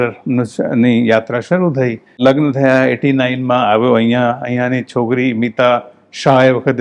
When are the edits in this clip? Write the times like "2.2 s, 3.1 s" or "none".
2.2 s